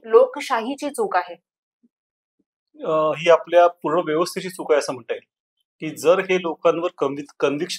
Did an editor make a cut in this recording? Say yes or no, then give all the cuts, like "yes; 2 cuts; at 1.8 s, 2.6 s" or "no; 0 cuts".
no; 0 cuts